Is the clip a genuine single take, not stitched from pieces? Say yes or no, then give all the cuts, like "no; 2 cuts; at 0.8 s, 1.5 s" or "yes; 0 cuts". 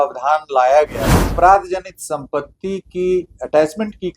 no; 1 cut; at 1.3 s